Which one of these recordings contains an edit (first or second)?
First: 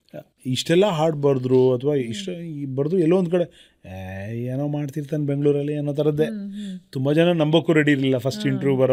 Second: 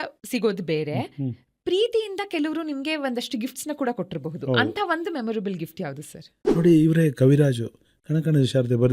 second